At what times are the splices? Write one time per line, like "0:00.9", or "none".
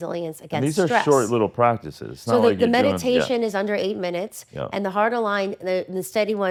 none